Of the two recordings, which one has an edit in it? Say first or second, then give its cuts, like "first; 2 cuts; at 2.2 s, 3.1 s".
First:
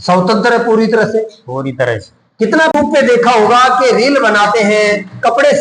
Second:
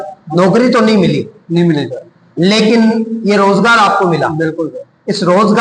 first; 1 cut; at 2.7 s